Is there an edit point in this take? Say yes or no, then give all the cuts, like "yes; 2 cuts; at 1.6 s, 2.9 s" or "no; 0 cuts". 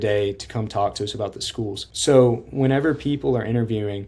yes; 1 cut; at 1.9 s